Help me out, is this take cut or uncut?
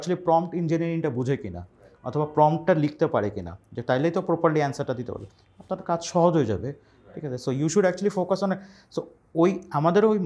uncut